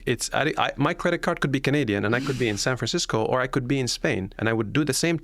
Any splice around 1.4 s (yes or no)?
no